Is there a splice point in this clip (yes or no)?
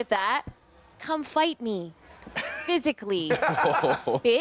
no